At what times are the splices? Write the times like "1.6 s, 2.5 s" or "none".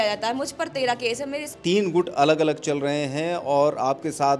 1.4 s